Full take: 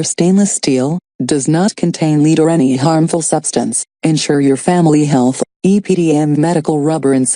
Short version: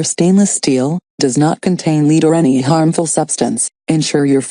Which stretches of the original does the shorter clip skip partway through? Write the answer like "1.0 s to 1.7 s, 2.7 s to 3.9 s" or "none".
1.5 s to 1.7 s